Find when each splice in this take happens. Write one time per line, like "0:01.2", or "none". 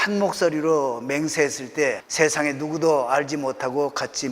0:02.0